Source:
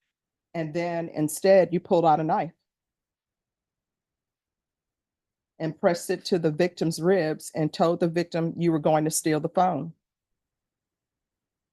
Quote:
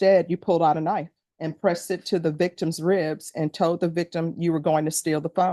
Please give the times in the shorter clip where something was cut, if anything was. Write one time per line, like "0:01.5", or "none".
0:01.2